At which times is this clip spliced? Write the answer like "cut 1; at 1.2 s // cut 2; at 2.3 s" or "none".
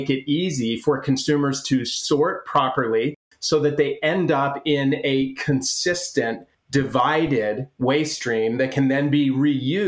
cut 1; at 3.2 s